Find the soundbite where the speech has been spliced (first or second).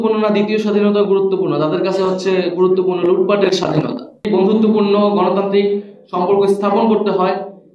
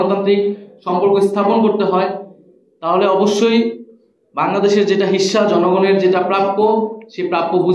first